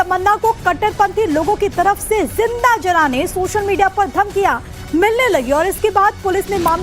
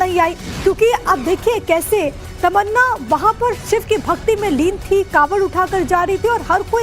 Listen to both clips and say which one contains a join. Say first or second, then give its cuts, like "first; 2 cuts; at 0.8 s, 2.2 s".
second; 1 cut; at 0.9 s